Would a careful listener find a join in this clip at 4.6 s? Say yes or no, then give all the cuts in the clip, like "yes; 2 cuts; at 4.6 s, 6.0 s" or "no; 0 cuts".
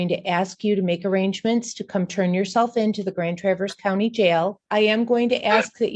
yes; 1 cut; at 4.6 s